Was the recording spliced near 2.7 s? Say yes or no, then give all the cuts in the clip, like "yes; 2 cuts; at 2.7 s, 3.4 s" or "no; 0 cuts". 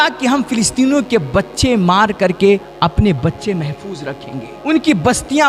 yes; 2 cuts; at 2.7 s, 4.5 s